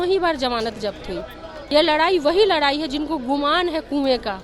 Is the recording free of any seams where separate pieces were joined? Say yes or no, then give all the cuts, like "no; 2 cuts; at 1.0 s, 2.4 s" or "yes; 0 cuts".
no; 1 cut; at 1.5 s